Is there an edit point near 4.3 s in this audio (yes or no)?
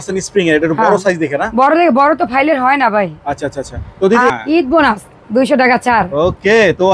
yes